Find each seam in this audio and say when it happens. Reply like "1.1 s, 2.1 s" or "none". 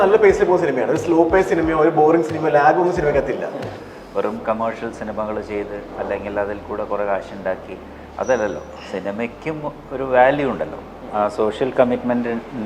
3.8 s, 11.0 s